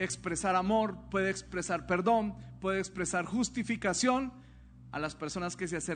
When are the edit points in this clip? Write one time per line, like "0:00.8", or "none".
none